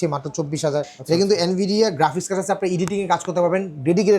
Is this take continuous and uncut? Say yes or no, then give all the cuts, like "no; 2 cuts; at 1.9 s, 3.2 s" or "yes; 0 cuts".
no; 1 cut; at 0.9 s